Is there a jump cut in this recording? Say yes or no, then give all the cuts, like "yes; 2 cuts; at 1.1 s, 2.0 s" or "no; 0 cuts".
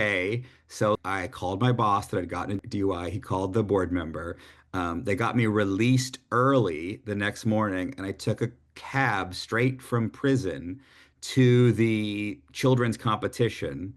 yes; 2 cuts; at 1.0 s, 2.6 s